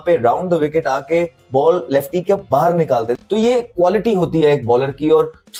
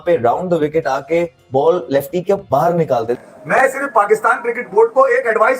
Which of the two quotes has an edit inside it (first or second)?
second